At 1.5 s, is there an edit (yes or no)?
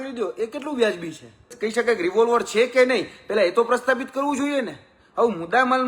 yes